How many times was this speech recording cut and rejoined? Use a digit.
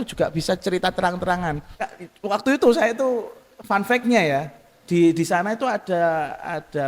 1